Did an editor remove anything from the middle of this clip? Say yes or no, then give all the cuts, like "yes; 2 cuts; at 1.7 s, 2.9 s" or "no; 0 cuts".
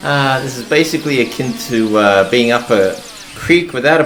no; 0 cuts